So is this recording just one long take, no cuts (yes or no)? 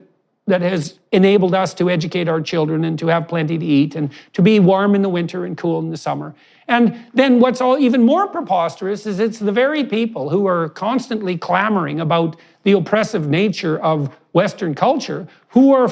yes